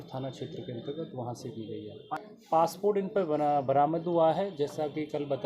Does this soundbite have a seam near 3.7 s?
no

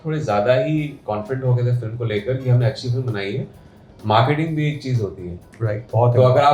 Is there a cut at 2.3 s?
no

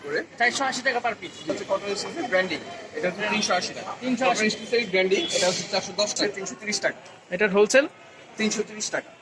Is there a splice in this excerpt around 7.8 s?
no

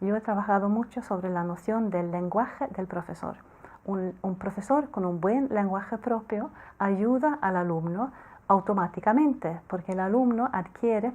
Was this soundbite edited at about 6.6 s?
yes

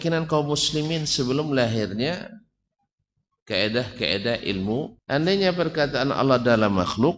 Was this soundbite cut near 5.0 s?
yes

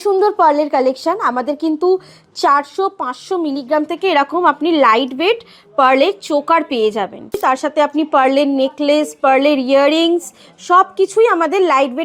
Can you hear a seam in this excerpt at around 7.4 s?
yes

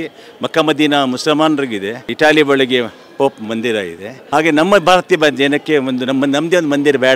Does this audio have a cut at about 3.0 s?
no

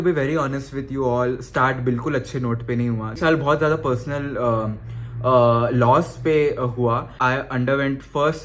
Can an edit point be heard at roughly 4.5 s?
no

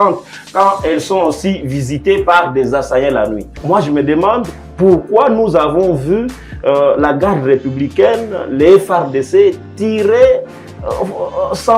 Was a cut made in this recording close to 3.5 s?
yes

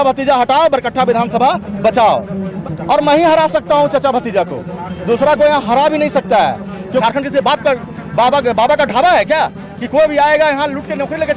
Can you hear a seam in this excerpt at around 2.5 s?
yes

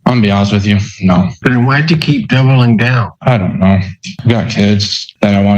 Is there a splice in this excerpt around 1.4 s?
no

